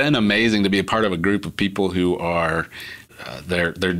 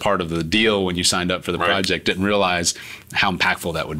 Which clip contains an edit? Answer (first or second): first